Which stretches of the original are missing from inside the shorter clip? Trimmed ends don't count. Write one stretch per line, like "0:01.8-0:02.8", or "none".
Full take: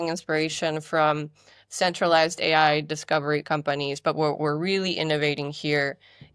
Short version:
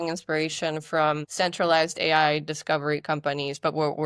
0:01.3-0:01.7